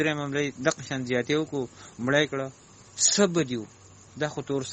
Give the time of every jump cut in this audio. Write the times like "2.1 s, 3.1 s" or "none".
none